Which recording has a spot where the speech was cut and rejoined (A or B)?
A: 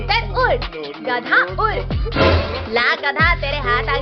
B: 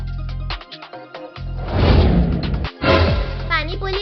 B